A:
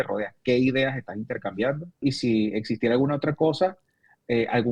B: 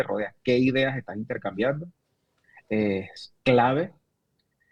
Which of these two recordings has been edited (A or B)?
A